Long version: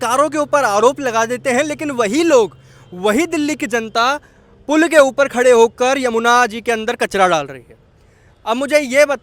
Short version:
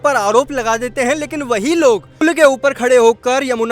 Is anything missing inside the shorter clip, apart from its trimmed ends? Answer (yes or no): yes